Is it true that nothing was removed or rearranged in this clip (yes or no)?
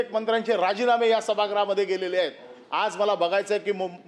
yes